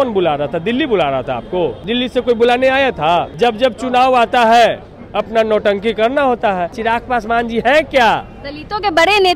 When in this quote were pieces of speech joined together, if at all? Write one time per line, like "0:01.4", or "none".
0:01.8
0:03.3
0:06.8